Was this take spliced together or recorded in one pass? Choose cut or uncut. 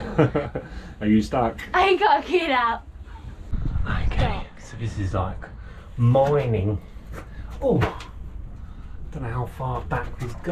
cut